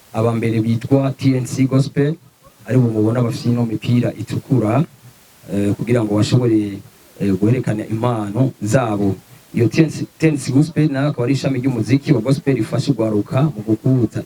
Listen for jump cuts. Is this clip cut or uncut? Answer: uncut